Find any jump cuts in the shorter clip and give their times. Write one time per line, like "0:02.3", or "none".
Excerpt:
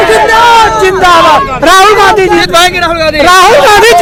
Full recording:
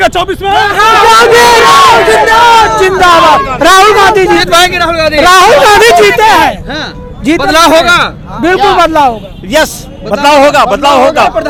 none